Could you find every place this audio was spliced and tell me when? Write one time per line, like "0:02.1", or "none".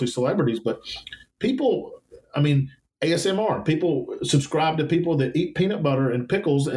0:02.8